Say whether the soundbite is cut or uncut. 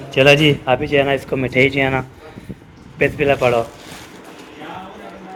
uncut